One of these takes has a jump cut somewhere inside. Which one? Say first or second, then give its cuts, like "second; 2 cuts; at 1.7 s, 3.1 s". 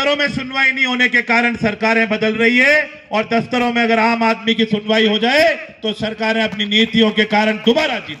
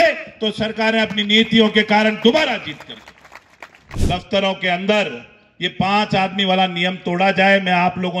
second; 1 cut; at 3.8 s